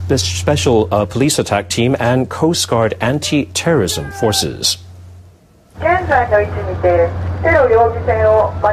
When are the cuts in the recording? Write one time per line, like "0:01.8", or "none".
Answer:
0:01.3